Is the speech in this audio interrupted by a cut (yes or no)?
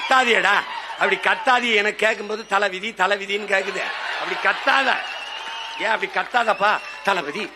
no